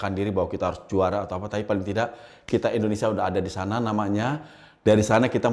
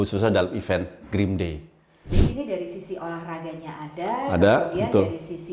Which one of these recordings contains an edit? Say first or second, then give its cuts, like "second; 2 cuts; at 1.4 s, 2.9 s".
second; 1 cut; at 2.2 s